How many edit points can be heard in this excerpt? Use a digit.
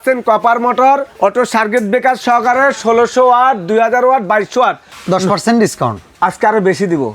3